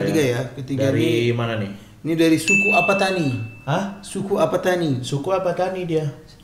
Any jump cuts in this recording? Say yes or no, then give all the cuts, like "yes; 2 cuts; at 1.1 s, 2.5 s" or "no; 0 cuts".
no; 0 cuts